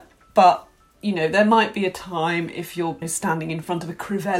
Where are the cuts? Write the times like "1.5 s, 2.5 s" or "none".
3.1 s